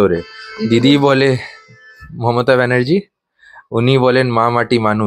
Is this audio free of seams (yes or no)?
yes